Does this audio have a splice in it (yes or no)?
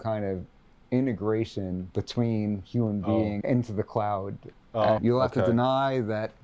yes